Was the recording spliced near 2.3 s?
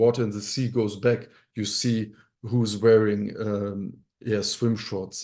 no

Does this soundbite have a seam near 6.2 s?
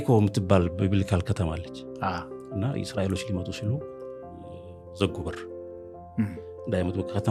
no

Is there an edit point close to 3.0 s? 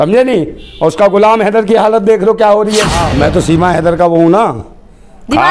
yes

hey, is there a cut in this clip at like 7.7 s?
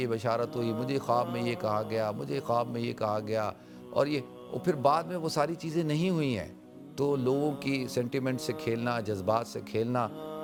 no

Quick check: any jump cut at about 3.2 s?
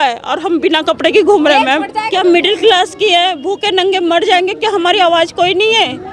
no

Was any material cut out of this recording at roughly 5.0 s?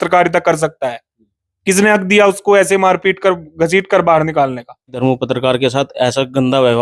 yes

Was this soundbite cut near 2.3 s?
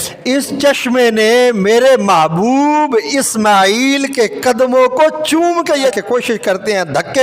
no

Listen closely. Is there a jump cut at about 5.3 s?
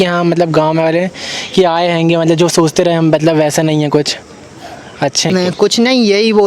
yes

